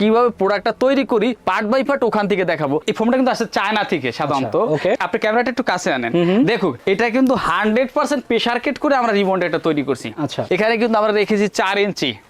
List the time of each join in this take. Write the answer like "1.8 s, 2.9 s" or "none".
2.8 s, 10.4 s